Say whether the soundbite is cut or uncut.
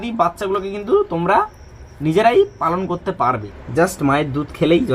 cut